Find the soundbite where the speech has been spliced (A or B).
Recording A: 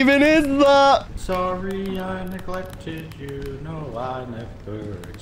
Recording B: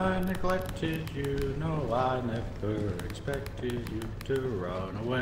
A